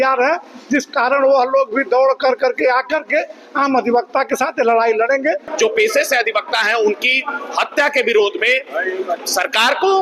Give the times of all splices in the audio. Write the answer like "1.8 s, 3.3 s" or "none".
5.5 s